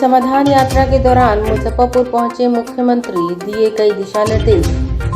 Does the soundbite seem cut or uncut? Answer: uncut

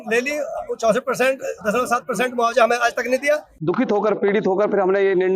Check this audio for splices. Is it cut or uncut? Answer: cut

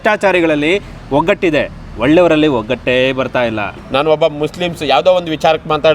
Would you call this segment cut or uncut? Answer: cut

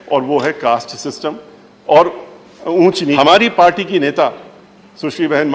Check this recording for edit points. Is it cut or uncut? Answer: cut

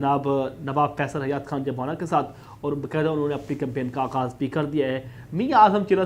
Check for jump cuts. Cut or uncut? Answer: uncut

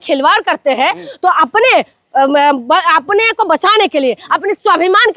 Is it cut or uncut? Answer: uncut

